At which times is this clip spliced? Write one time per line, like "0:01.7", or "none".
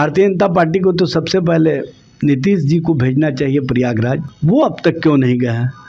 0:04.3